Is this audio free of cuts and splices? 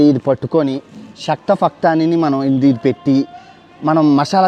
yes; 0 cuts

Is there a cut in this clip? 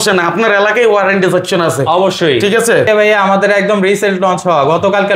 yes; 1 cut; at 2.9 s

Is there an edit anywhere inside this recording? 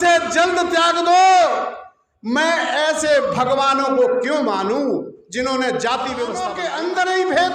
yes; 1 cut; at 6.5 s

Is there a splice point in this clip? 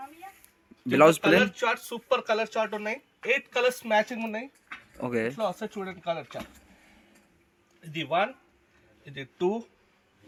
no; 0 cuts

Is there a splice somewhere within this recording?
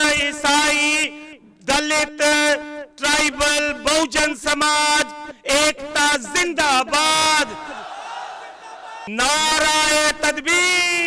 yes; 1 cut; at 9.2 s

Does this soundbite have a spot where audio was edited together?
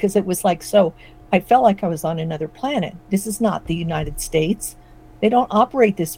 no; 0 cuts

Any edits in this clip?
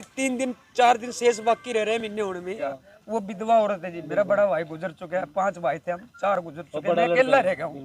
yes; 1 cut; at 2.6 s

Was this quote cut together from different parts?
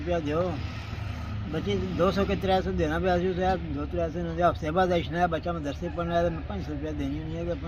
no; 0 cuts

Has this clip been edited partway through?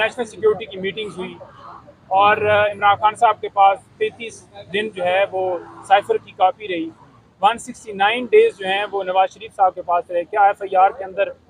no; 0 cuts

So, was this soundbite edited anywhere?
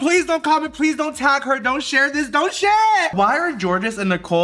yes; 1 cut; at 3.1 s

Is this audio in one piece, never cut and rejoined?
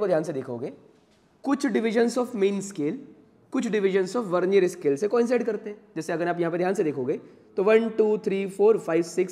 yes; 0 cuts

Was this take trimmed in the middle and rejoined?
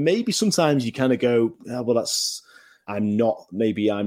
yes; 1 cut; at 2.7 s

